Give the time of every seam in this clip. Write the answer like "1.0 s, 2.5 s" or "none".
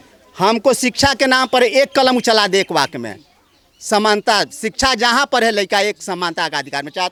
none